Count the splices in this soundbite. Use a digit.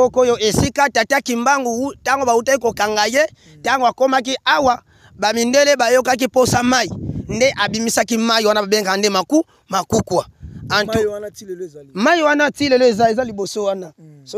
0